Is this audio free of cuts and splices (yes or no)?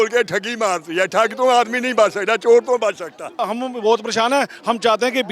no